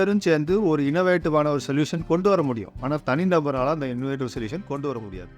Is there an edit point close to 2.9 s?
no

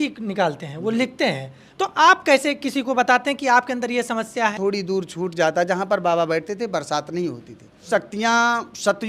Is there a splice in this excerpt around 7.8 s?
yes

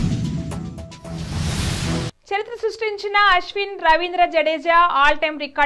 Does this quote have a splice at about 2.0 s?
yes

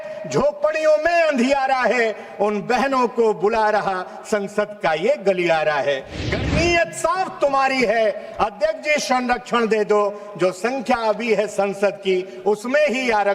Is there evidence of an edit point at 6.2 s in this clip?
yes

